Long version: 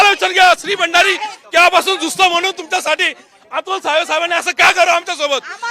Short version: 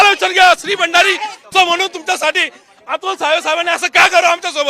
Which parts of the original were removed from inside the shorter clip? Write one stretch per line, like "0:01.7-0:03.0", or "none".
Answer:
0:01.4-0:02.1